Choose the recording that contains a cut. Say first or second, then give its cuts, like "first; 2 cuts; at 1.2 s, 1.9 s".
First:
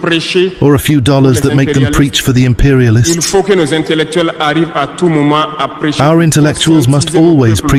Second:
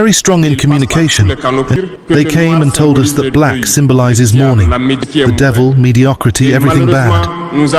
second; 1 cut; at 1.8 s